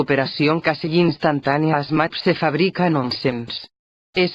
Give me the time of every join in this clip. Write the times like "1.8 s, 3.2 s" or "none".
none